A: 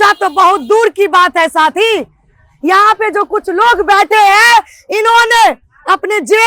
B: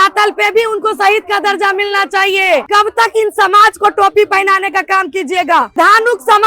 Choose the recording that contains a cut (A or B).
B